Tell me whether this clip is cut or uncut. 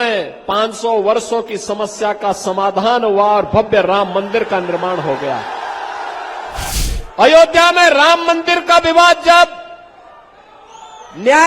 cut